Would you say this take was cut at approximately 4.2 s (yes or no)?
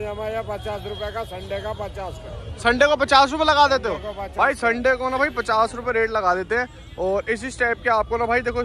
no